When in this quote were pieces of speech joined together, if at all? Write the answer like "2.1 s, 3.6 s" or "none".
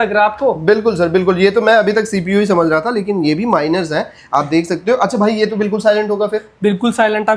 none